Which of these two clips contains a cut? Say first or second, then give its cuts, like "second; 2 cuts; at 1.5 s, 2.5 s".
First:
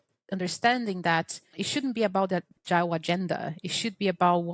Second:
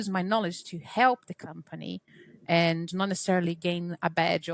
first; 2 cuts; at 1.6 s, 2.5 s